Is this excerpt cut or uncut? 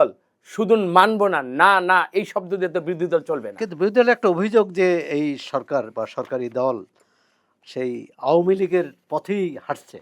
uncut